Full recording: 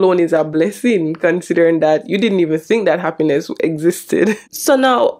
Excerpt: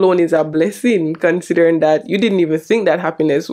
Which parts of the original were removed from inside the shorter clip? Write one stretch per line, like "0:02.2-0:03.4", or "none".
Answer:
none